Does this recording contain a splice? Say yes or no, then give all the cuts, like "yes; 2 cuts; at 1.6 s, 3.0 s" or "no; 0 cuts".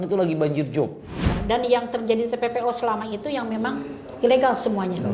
yes; 1 cut; at 1.3 s